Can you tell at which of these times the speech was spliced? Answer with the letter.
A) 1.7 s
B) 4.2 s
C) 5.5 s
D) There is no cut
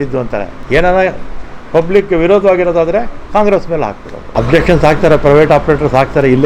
B